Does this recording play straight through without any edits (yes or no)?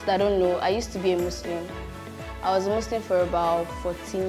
yes